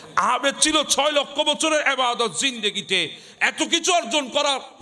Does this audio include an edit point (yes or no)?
no